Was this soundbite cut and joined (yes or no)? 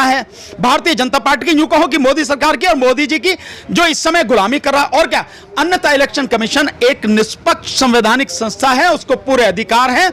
no